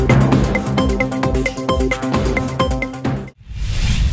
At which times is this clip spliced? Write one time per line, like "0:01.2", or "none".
0:03.2